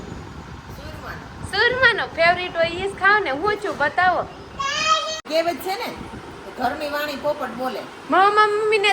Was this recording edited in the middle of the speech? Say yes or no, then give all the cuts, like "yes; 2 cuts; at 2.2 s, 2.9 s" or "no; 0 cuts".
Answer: yes; 1 cut; at 5.2 s